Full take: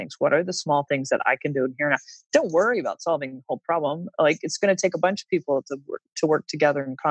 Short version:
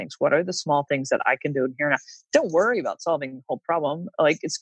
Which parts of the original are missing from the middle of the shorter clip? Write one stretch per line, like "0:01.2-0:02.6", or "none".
none